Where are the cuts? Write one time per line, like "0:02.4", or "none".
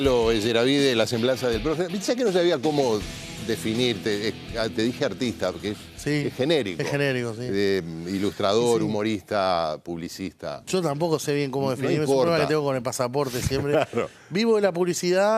0:14.2